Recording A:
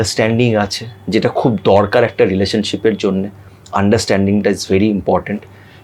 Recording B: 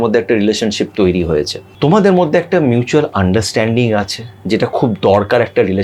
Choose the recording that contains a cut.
B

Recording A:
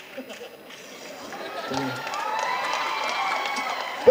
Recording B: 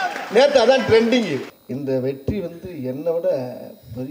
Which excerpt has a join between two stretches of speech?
B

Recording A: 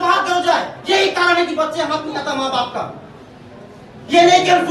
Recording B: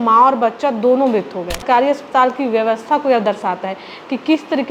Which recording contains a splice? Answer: B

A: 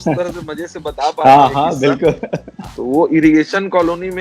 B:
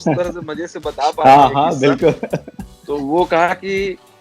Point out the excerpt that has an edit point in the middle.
A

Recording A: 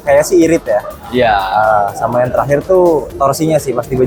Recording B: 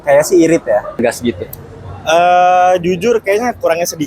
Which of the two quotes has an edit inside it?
B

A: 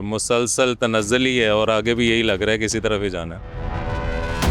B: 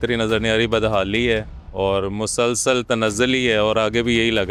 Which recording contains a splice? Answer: A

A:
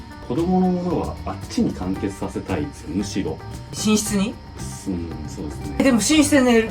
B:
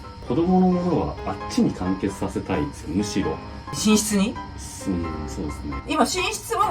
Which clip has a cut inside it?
B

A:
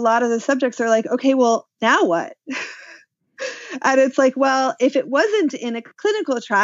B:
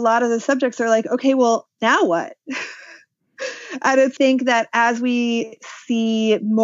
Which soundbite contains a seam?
B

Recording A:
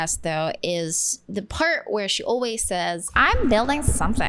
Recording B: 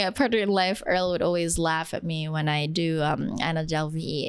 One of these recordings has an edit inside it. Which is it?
A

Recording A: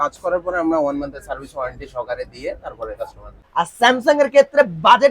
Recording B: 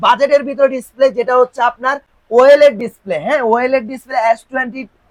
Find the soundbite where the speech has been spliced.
A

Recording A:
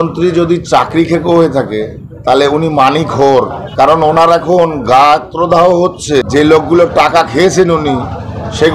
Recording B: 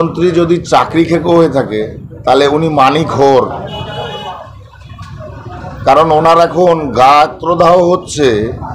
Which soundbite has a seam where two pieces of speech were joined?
A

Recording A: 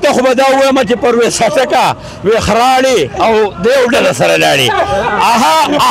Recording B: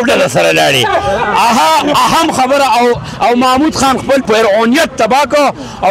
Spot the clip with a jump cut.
B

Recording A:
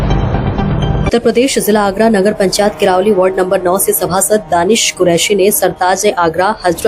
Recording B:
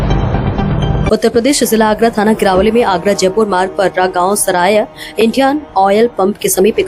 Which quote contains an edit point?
A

